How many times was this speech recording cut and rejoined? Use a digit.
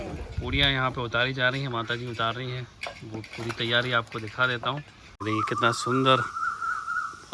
1